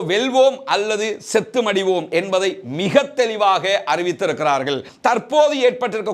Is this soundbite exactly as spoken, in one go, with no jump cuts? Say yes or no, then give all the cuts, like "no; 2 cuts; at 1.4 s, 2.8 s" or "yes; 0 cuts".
no; 1 cut; at 4.9 s